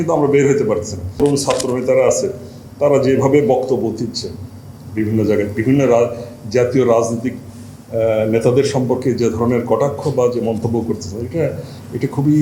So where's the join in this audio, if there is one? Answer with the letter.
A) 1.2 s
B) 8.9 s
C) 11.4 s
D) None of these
A